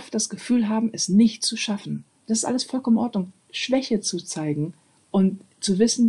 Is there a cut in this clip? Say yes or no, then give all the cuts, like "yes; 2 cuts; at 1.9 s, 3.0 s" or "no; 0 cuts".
yes; 1 cut; at 2.2 s